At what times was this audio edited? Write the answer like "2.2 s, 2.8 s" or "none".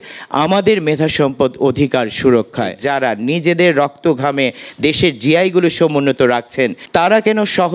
2.8 s, 6.8 s